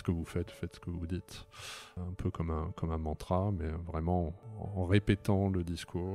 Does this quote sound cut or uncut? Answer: cut